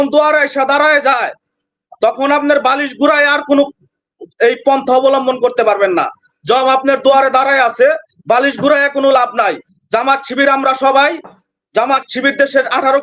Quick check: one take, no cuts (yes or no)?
yes